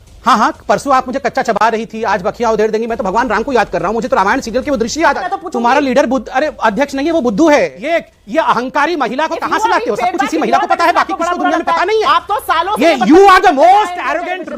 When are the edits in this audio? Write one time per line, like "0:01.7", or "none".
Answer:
0:05.3
0:07.8